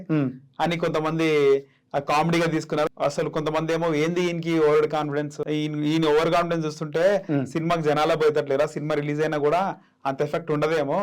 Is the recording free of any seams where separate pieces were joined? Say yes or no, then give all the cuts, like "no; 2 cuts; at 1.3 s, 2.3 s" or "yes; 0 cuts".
no; 2 cuts; at 2.9 s, 5.4 s